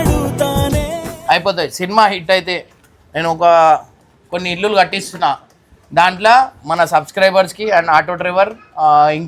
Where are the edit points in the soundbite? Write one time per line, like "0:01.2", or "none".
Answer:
0:01.1